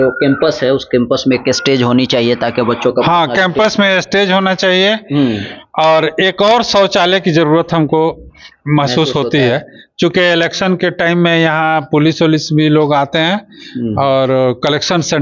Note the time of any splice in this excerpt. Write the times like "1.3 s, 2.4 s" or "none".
none